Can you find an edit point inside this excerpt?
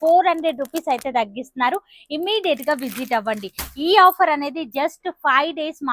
no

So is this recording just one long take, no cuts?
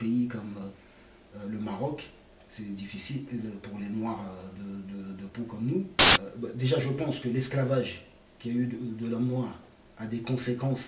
no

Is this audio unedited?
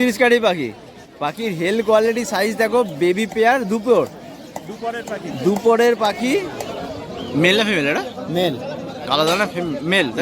no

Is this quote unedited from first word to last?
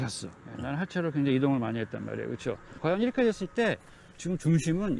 no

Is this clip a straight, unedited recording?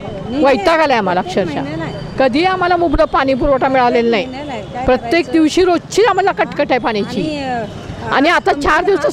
yes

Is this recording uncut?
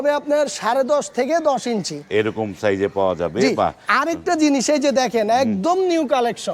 yes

